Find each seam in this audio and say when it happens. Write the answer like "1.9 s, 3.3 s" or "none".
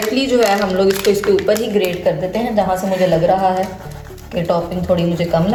none